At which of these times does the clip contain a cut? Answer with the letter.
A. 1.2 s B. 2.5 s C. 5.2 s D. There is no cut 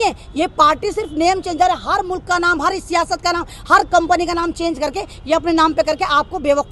D